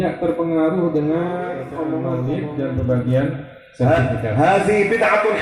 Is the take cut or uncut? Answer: cut